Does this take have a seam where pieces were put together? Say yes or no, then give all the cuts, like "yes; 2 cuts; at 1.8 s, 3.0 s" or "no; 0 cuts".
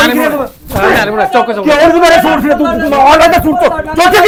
no; 0 cuts